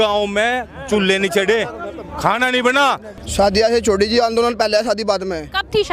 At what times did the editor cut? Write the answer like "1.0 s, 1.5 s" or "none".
3.2 s